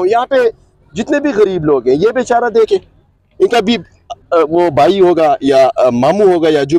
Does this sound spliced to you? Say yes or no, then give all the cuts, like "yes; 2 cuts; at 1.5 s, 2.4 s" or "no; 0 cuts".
no; 0 cuts